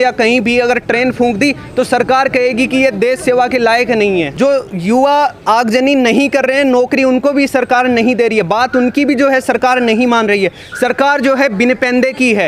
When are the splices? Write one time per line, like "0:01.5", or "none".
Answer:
0:04.3